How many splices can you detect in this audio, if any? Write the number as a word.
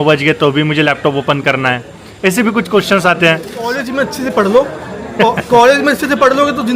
one